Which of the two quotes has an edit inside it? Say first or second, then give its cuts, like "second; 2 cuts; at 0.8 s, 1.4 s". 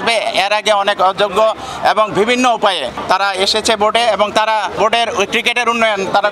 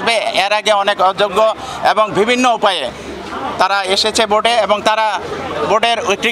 first; 2 cuts; at 2.9 s, 4.8 s